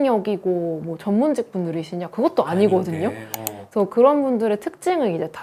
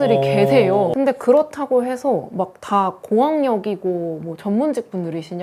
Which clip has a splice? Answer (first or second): second